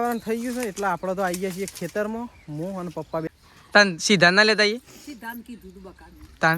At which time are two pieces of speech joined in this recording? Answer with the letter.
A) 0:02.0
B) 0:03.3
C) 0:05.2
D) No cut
B